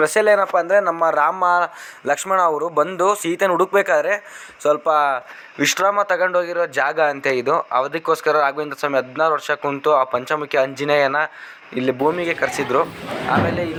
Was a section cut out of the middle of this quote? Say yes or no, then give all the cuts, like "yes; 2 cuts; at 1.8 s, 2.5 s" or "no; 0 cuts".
no; 0 cuts